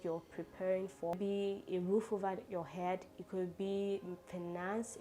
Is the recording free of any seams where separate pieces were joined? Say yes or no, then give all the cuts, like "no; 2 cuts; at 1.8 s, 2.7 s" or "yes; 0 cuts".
no; 1 cut; at 1.1 s